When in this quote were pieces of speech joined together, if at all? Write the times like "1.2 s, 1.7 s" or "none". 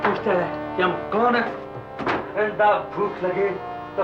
none